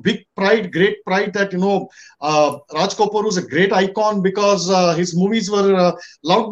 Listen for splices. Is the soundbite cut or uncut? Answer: uncut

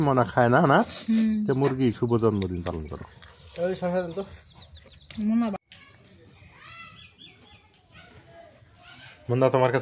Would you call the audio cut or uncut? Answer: cut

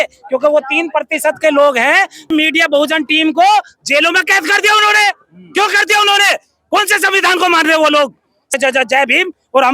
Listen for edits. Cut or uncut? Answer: cut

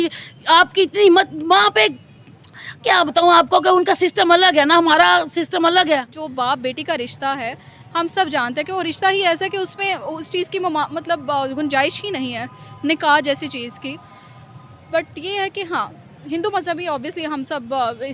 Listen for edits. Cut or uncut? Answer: cut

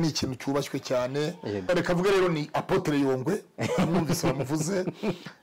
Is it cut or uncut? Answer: cut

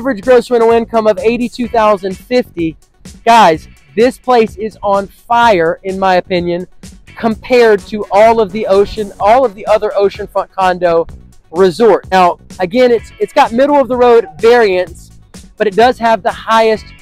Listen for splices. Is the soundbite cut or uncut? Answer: cut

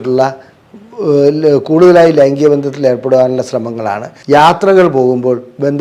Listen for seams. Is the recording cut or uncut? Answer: cut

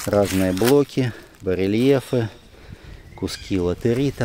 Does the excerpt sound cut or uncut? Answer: uncut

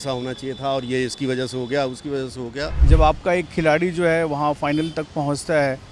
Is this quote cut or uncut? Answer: cut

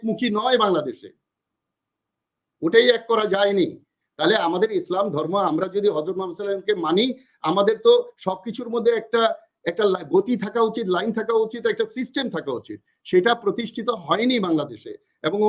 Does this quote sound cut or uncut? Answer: uncut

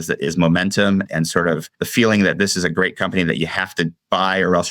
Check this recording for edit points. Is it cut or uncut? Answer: cut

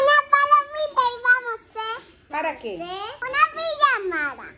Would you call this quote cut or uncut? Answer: cut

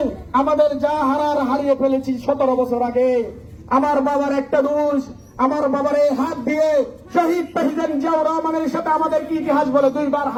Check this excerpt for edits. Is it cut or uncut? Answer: uncut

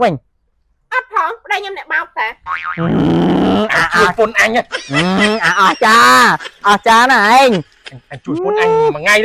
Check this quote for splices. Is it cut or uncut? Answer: uncut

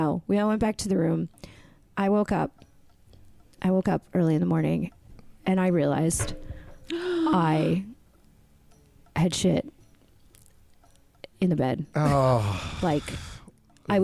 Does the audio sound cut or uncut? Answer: uncut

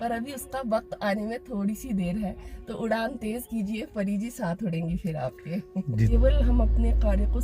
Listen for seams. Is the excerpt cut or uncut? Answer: cut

